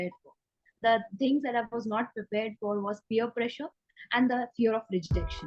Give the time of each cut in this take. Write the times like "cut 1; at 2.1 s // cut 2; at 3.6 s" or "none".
none

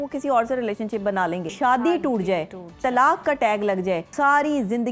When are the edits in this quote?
cut 1; at 1.5 s // cut 2; at 4.1 s

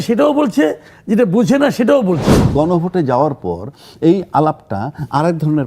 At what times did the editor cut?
cut 1; at 2.5 s

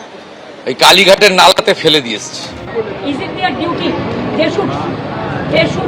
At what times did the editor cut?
cut 1; at 2.5 s

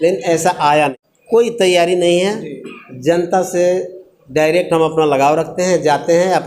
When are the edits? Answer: cut 1; at 1.1 s

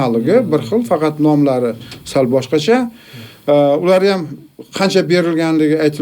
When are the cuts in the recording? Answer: none

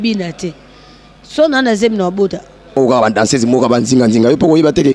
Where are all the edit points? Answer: cut 1; at 2.8 s

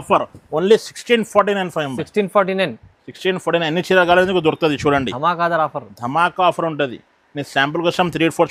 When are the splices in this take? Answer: none

